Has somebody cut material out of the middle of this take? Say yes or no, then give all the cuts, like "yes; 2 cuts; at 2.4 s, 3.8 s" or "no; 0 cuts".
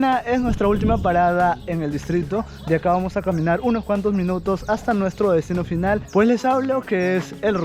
no; 0 cuts